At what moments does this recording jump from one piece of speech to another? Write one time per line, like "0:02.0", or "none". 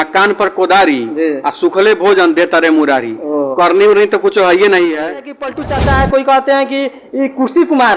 0:05.5